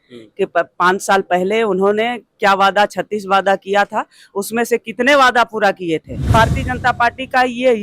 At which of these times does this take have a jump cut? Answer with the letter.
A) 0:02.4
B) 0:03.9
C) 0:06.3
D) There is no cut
C